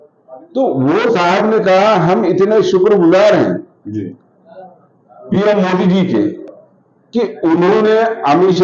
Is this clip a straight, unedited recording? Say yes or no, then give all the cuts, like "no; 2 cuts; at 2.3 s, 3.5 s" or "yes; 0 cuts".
yes; 0 cuts